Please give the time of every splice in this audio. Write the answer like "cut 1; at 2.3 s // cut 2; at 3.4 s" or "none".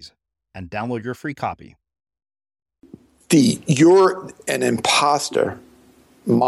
cut 1; at 3.1 s